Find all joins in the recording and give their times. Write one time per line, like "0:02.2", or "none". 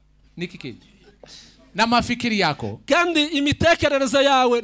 none